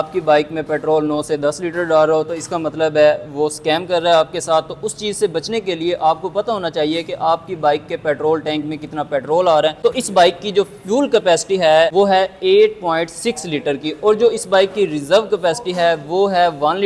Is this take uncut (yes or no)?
yes